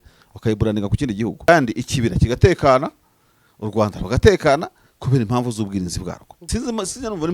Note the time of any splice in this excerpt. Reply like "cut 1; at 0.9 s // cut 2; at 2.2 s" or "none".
cut 1; at 1.5 s // cut 2; at 6.3 s

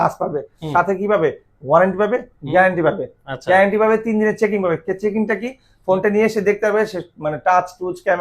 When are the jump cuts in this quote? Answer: none

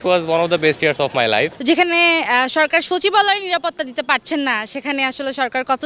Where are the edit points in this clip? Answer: cut 1; at 1.6 s

